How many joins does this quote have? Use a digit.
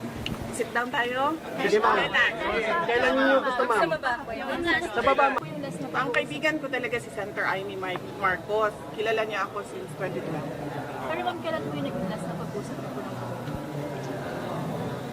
1